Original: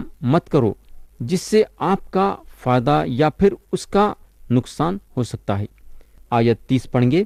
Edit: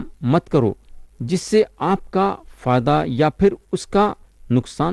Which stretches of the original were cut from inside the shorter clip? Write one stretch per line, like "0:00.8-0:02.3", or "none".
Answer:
none